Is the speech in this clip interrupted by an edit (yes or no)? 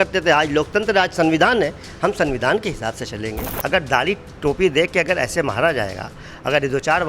yes